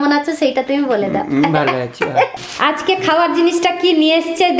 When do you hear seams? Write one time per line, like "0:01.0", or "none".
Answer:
0:02.4